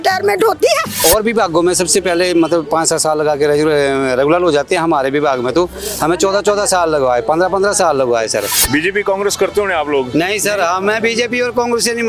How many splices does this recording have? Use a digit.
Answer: 1